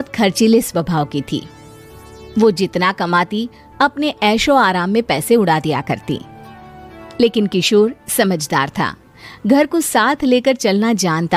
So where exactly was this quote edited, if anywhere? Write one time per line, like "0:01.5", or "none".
none